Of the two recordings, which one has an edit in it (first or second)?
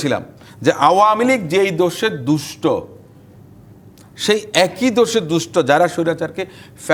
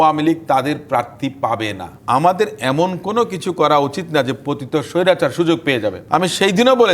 second